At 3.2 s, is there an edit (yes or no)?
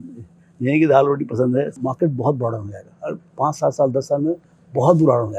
no